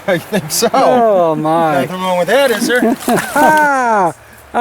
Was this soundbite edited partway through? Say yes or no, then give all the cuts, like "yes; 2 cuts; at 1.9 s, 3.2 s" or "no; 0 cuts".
yes; 1 cut; at 3.3 s